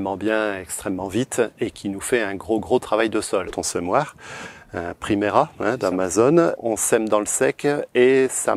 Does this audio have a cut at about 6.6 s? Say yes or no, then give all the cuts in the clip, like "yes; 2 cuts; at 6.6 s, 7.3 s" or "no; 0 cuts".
yes; 2 cuts; at 3.6 s, 6.6 s